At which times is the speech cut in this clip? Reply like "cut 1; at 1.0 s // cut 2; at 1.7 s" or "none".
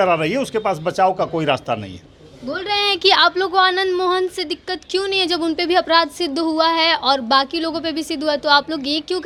none